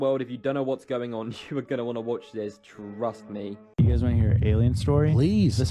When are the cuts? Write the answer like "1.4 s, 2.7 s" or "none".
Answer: 3.6 s